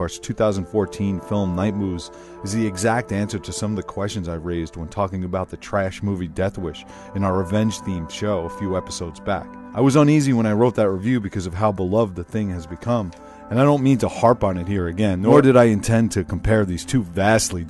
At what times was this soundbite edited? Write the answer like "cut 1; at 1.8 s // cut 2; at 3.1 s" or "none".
cut 1; at 12.2 s